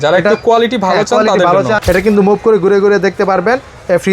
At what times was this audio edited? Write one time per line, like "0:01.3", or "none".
0:01.8